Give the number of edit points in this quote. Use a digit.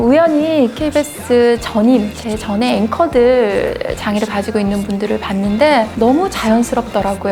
1